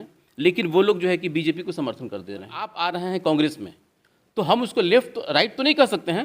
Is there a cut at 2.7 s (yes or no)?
yes